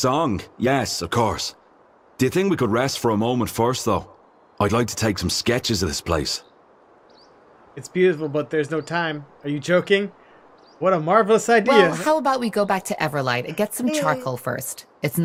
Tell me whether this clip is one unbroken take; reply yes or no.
yes